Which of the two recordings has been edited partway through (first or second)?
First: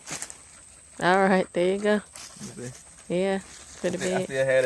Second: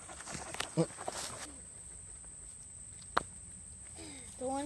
second